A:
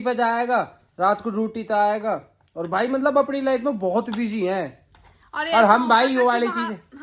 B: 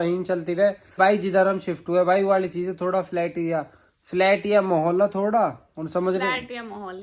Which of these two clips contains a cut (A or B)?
B